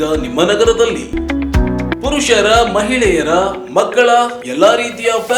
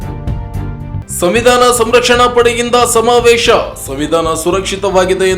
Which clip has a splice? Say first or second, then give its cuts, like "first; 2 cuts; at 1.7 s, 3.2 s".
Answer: second; 1 cut; at 1.1 s